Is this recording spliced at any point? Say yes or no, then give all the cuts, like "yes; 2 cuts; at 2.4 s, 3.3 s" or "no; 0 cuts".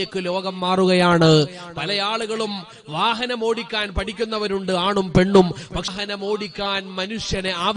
yes; 1 cut; at 5.9 s